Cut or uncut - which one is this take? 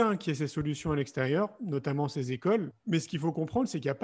cut